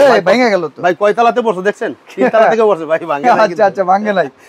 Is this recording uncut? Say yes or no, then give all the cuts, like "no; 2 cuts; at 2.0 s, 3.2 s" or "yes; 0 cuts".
yes; 0 cuts